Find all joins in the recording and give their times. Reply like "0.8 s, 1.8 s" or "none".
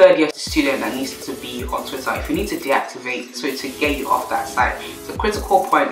none